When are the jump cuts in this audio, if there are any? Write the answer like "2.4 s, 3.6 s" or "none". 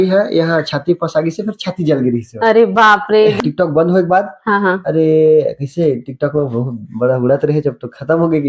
3.4 s